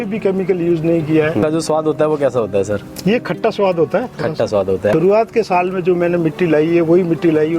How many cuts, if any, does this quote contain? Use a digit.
2